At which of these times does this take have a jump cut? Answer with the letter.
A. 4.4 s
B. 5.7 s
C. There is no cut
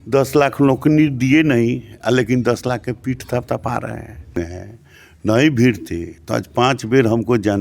A